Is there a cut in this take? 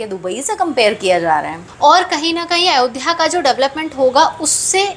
yes; 1 cut; at 1.6 s

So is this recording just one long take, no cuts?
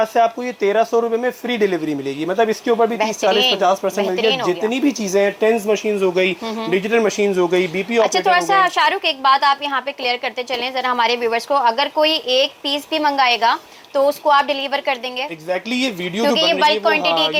yes; 0 cuts

